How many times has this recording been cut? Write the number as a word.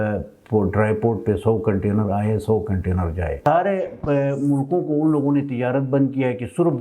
one